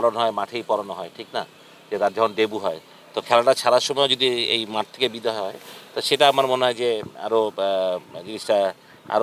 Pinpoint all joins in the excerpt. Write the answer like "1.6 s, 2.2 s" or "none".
none

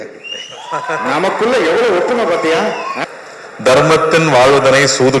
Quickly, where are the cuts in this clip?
2.9 s

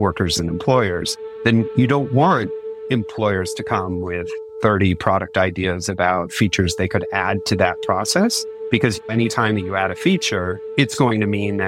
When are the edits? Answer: 4.4 s, 9.0 s, 10.6 s

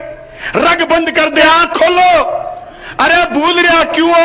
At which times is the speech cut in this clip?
1.4 s

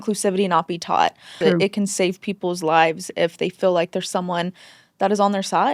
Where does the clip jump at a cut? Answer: none

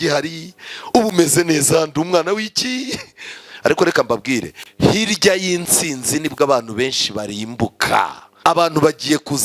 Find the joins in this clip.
8.2 s

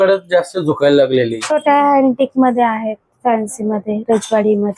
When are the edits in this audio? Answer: 1.4 s

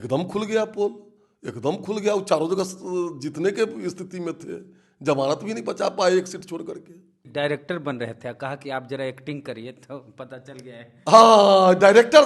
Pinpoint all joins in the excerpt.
7.2 s

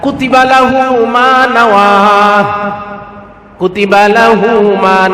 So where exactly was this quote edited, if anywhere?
none

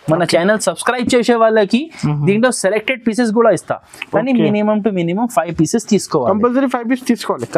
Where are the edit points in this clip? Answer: none

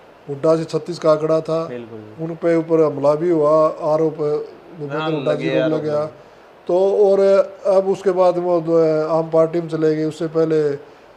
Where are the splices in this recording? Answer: none

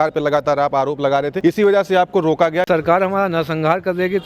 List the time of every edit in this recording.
1.3 s, 2.7 s

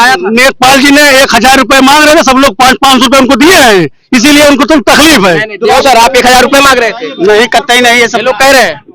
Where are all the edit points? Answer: 5.8 s

